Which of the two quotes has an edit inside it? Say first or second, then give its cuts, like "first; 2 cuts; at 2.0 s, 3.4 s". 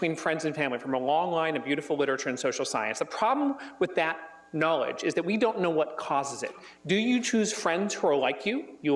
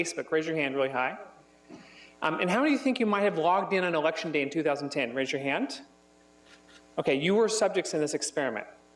second; 1 cut; at 7.9 s